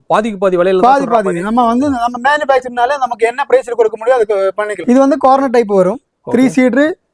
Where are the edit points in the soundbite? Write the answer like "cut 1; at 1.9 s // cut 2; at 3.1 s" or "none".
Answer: cut 1; at 4.8 s